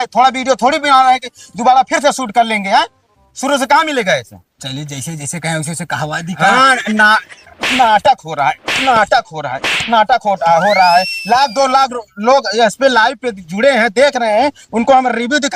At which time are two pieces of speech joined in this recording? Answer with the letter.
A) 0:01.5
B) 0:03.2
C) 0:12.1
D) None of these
D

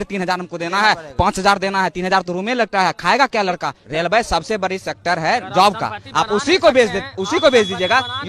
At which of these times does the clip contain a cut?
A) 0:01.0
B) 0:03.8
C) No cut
B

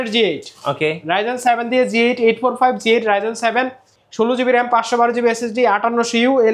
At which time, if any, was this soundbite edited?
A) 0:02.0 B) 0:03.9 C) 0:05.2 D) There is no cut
D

